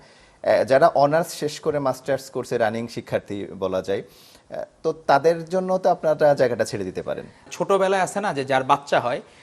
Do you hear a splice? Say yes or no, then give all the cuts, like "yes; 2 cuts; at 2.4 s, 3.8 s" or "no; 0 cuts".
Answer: yes; 1 cut; at 7.5 s